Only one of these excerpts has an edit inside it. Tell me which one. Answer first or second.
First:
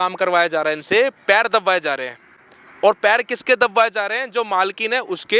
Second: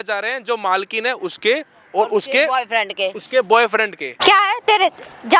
second